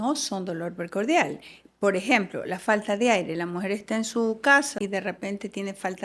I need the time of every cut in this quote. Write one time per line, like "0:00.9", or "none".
0:04.8